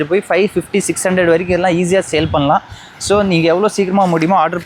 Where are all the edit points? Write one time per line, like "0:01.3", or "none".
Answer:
none

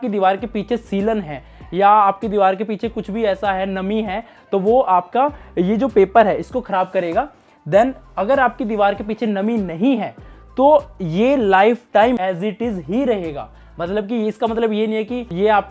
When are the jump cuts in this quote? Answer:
none

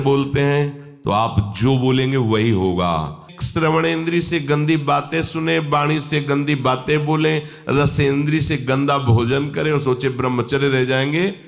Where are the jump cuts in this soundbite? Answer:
0:03.3

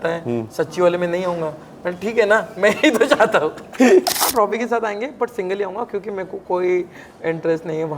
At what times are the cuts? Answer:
0:04.2

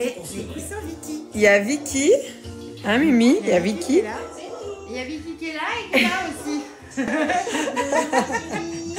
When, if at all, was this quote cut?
0:07.1

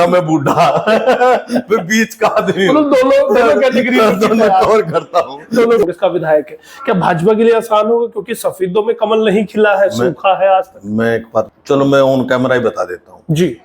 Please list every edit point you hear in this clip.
0:05.8
0:11.6

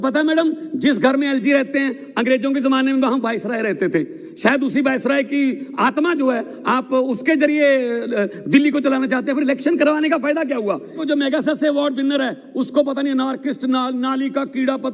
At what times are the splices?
0:11.0

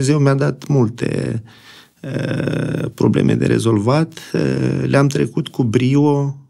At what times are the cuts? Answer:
none

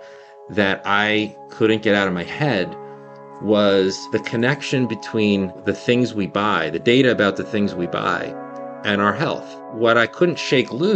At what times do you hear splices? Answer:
0:04.0
0:05.6
0:09.6

